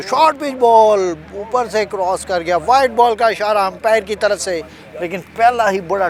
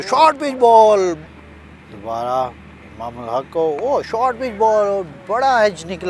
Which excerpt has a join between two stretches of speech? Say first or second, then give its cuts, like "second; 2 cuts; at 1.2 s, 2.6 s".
second; 1 cut; at 1.3 s